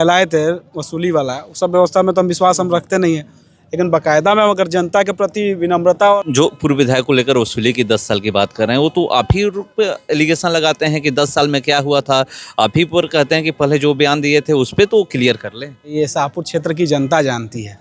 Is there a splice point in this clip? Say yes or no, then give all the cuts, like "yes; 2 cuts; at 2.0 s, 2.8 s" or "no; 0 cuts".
yes; 2 cuts; at 6.2 s, 15.9 s